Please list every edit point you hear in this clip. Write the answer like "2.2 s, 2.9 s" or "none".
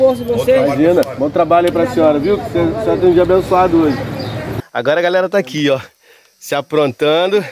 4.4 s